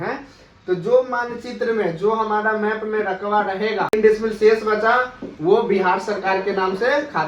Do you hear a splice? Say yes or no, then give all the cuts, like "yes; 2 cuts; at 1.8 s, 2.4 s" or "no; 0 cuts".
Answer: yes; 1 cut; at 3.9 s